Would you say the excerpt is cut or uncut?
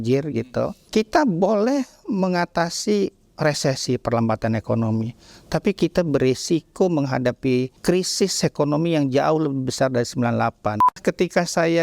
cut